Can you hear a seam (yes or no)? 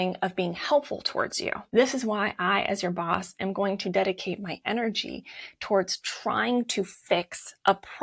no